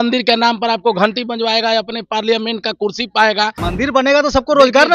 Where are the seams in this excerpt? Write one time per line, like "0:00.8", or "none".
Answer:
0:03.6